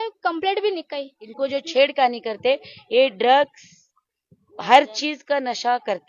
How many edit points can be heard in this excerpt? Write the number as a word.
one